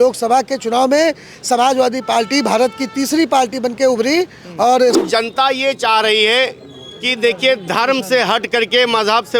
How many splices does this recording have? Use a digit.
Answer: 1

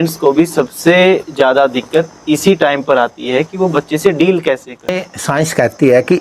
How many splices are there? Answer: 1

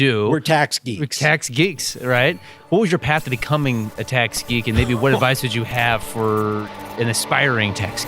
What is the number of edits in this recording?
1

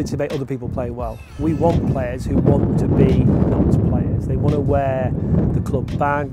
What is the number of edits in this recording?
1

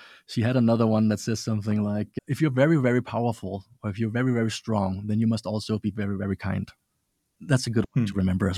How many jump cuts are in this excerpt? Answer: 2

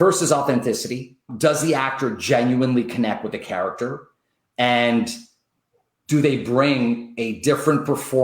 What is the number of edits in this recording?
1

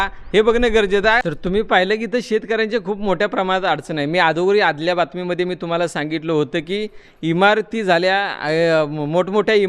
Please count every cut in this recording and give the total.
1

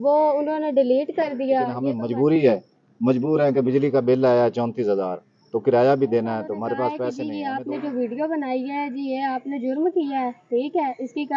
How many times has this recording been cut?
2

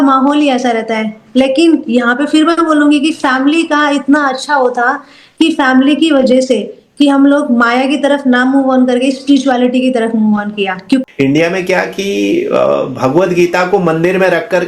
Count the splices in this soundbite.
1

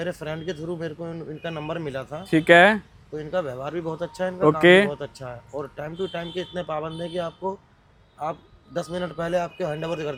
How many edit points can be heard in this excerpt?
0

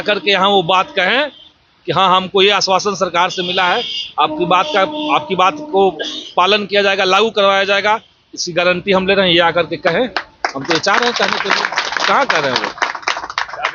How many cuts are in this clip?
0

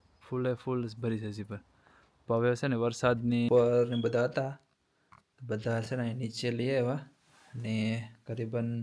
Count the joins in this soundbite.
1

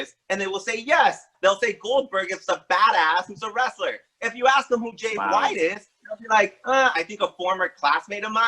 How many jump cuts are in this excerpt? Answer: 2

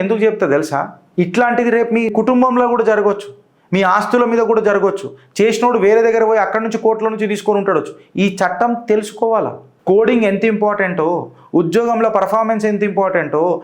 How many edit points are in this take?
1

